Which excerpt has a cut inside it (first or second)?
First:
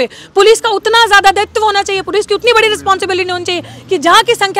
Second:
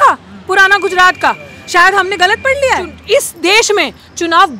second